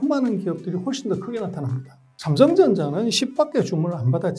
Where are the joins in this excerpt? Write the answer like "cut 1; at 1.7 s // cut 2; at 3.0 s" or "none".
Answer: cut 1; at 2.1 s